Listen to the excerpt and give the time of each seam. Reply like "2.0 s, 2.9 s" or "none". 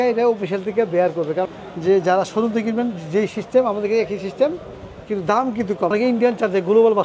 1.5 s, 5.9 s